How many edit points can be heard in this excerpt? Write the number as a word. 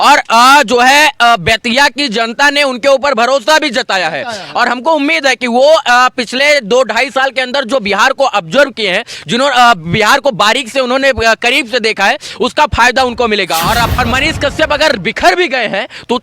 one